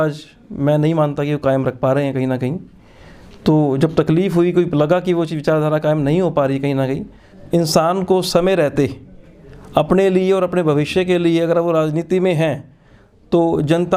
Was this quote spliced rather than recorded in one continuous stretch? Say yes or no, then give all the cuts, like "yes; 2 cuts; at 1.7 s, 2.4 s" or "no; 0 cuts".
yes; 1 cut; at 7.3 s